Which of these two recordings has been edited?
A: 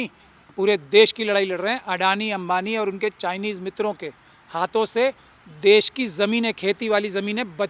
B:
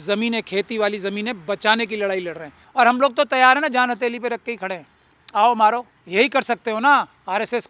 B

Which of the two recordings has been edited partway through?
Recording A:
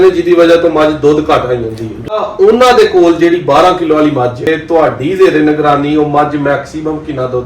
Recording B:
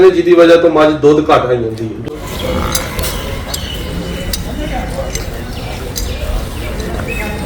A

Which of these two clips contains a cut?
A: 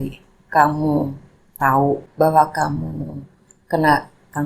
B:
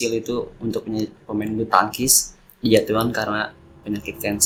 A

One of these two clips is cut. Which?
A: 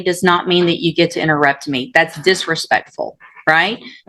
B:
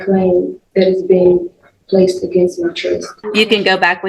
B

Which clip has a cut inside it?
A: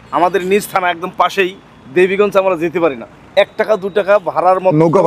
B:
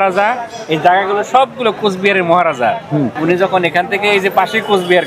B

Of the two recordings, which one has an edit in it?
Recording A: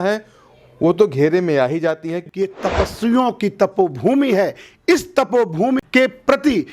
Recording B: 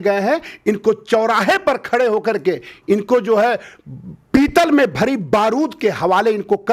A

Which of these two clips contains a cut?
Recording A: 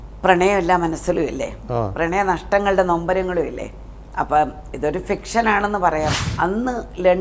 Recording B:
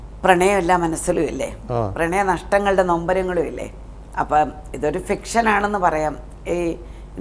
A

